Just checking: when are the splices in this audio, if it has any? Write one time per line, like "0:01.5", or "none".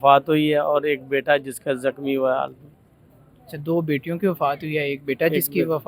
none